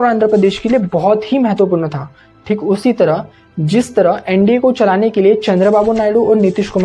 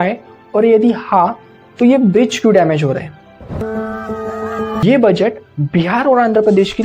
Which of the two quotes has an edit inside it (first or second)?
second